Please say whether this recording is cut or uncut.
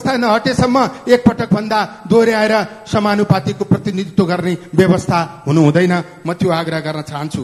uncut